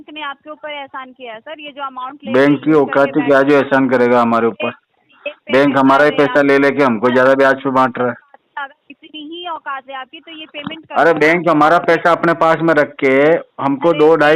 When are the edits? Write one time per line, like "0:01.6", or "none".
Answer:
none